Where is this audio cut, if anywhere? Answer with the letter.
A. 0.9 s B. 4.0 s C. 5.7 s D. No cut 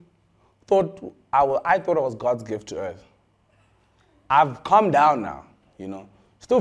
D